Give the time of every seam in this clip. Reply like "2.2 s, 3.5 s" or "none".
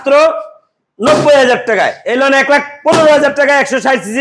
2.0 s